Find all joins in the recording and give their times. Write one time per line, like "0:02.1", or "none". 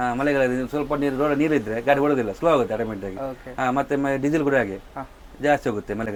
none

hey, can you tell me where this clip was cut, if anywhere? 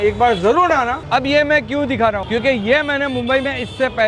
0:01.0

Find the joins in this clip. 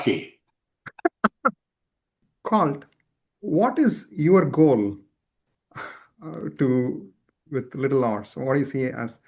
0:02.1

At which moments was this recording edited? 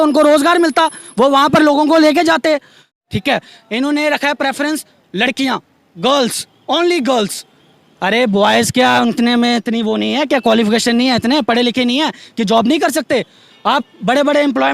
0:02.8

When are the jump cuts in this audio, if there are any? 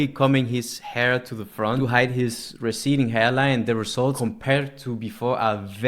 0:01.8
0:04.2

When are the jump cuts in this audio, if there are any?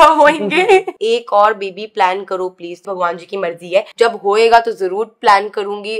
0:00.9
0:02.8

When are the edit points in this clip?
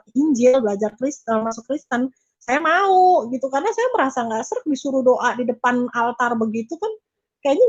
none

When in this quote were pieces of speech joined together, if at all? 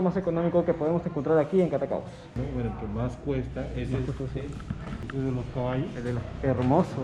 0:02.2
0:05.0

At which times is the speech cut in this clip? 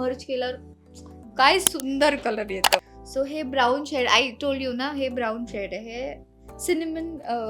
0:02.8

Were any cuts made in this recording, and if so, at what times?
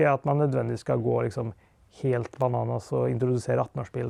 none

